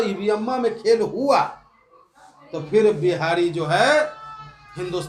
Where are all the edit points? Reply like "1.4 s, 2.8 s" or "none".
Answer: none